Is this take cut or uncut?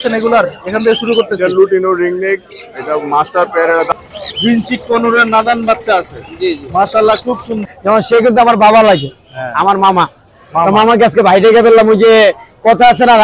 cut